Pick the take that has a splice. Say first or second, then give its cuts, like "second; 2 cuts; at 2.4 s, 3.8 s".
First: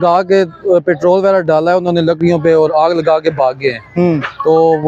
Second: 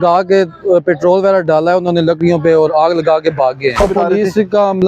second; 1 cut; at 3.8 s